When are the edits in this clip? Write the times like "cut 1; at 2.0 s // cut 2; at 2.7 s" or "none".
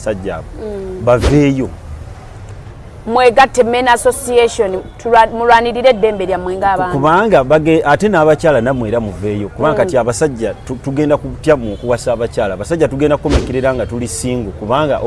none